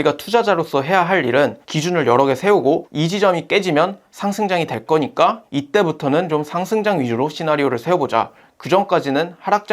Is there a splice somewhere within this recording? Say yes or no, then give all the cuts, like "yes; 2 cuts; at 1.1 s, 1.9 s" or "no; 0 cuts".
yes; 2 cuts; at 1.6 s, 5.5 s